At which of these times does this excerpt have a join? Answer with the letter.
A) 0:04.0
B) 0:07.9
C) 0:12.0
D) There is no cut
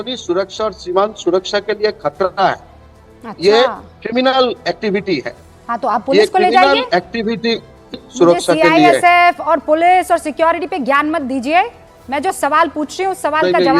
B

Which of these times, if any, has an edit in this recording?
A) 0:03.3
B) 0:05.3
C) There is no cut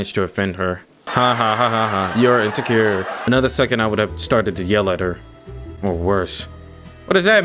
A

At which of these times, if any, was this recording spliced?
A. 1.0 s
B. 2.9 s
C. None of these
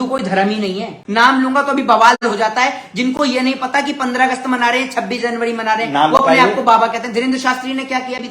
A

